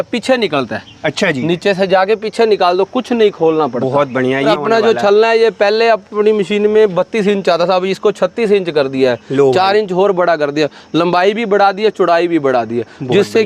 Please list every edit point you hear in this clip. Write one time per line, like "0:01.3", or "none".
0:04.5